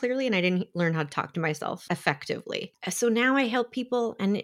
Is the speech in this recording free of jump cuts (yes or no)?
no